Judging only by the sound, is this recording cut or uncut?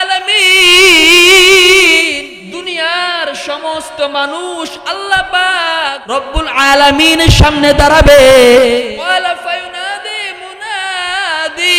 cut